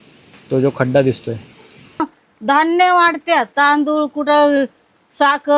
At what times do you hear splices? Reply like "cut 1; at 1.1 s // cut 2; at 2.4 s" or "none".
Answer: cut 1; at 2.0 s